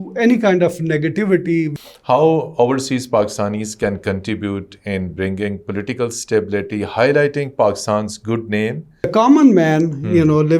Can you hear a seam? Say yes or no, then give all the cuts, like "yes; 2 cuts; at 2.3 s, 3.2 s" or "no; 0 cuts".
yes; 2 cuts; at 1.7 s, 9.1 s